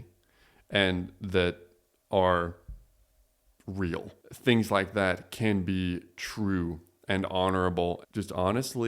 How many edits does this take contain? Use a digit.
2